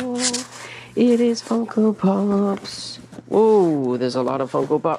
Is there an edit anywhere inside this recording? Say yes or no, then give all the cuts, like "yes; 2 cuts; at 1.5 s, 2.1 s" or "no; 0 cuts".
no; 0 cuts